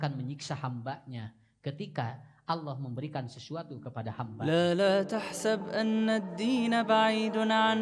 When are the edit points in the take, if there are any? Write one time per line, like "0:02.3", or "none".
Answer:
0:04.4